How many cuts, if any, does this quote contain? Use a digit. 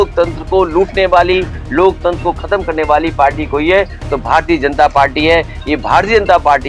0